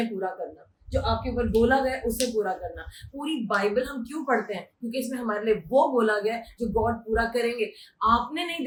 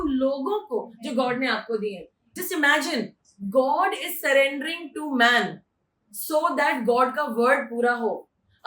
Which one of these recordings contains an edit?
second; 1 cut; at 2.3 s

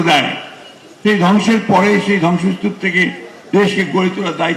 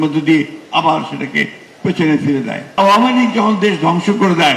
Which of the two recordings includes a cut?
second; 1 cut; at 2.8 s

